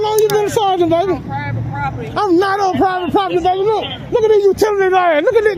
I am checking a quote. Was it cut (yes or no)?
no